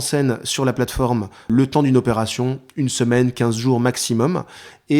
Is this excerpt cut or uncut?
cut